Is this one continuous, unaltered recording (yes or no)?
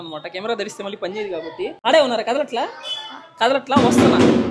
no